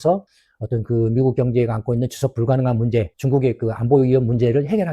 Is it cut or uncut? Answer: cut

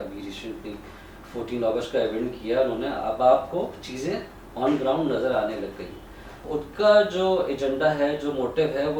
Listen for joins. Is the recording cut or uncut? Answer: cut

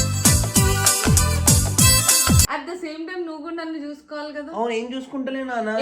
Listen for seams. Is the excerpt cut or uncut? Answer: cut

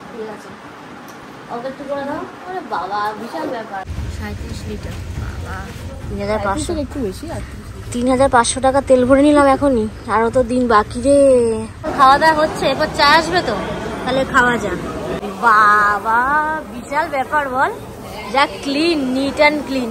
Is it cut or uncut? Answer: cut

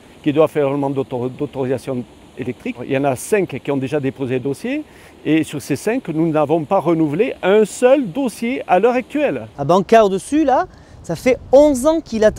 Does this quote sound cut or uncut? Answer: uncut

